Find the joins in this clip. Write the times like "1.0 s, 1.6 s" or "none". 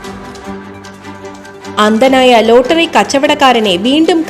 1.8 s